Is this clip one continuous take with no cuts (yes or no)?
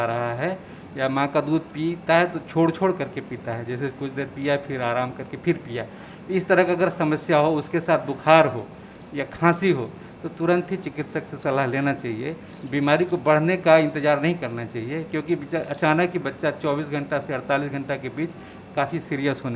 yes